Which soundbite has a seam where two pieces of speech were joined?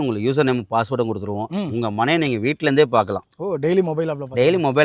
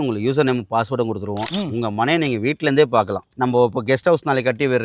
second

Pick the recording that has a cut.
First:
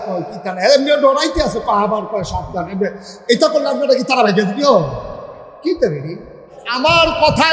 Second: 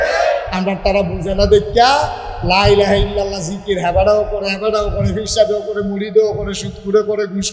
first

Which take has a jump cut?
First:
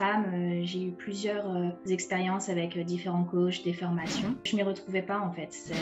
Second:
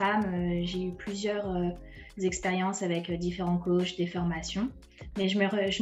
first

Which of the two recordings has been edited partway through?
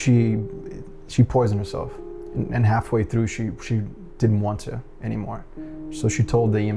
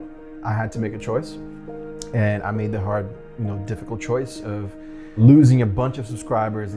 second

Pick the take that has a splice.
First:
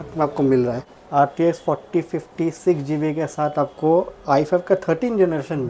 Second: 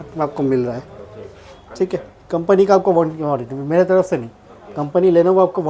first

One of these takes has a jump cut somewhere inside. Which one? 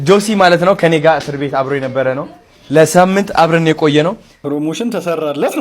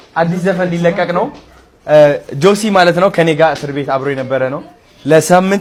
first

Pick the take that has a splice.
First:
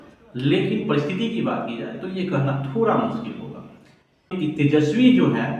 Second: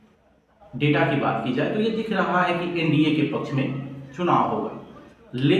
first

